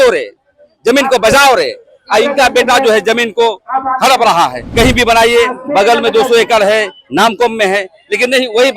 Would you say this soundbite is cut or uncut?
cut